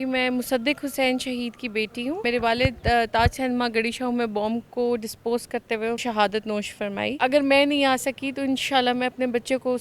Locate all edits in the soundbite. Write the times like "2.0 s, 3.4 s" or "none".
2.2 s, 6.0 s, 7.2 s